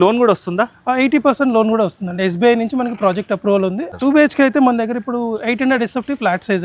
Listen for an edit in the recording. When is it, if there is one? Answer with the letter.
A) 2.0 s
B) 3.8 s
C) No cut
B